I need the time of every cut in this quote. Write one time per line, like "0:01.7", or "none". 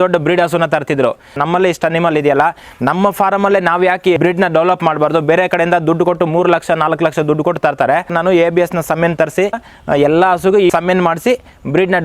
0:01.4
0:04.2
0:08.1
0:09.7
0:10.7